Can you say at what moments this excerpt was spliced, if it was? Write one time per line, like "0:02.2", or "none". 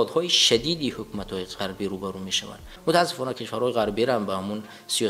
0:02.8